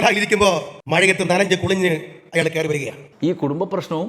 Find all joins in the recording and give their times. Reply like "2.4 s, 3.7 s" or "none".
3.0 s